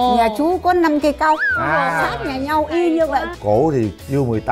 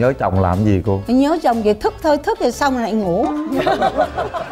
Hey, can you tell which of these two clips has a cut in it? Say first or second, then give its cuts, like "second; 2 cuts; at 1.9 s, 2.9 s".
first; 1 cut; at 3.3 s